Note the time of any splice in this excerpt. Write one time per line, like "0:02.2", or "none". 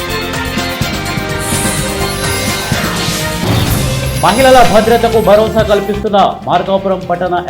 none